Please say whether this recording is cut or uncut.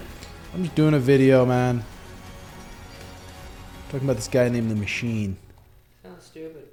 uncut